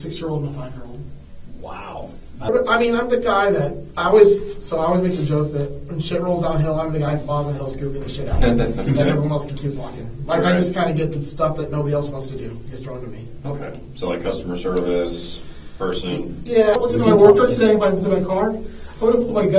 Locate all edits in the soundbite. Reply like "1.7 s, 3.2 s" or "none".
2.5 s, 16.8 s